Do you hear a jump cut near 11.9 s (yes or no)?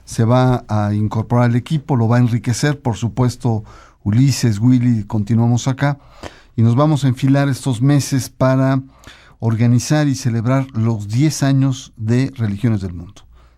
no